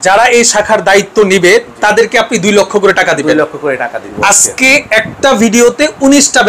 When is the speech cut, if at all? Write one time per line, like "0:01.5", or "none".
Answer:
0:04.1